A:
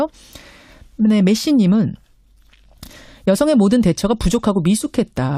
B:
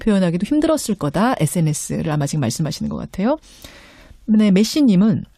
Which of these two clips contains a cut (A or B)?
B